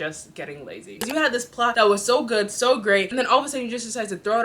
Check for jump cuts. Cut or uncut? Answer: cut